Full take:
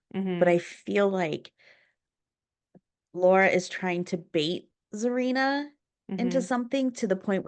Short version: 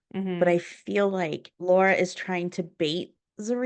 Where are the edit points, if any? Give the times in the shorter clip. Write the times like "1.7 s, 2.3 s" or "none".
1.5 s